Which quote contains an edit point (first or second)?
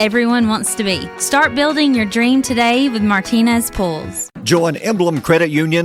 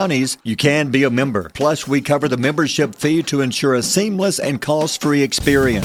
first